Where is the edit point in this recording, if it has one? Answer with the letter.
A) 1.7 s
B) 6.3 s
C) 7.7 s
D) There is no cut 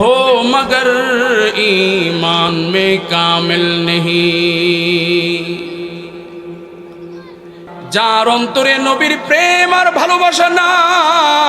C